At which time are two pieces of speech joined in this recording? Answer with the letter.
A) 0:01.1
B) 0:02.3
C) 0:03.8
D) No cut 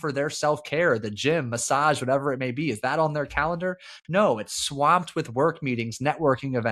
D